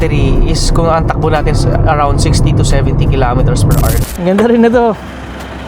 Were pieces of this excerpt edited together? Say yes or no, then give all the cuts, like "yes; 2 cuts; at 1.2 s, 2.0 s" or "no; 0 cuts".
yes; 1 cut; at 4.0 s